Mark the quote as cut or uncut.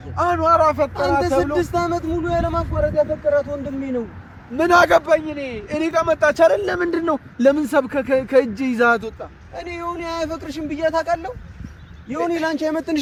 uncut